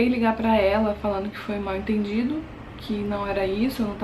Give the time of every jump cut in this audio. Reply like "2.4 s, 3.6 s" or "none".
none